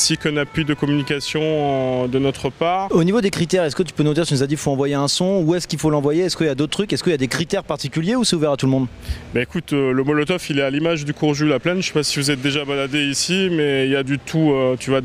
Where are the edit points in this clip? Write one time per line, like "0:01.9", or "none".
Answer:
none

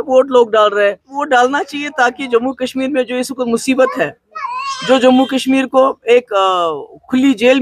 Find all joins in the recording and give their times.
0:01.2

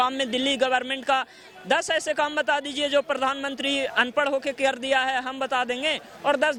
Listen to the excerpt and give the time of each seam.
none

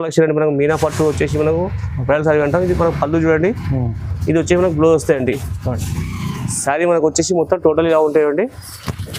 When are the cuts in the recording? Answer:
none

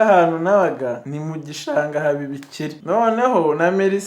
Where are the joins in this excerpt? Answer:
0:01.1
0:02.8

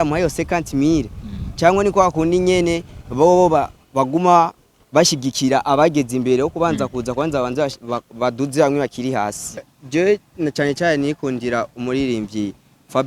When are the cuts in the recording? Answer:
0:09.7

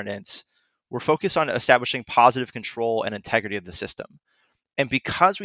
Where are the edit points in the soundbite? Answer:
none

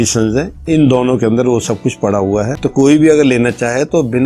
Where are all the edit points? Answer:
0:02.6

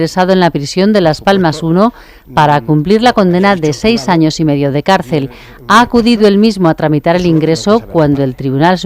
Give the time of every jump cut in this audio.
0:05.6

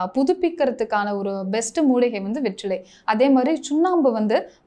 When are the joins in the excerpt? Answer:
none

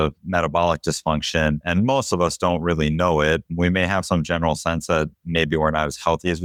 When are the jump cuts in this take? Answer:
none

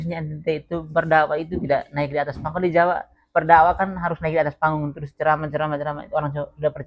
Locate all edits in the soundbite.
none

